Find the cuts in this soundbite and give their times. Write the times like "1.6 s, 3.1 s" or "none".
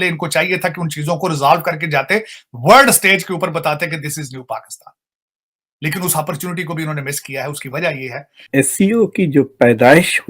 8.4 s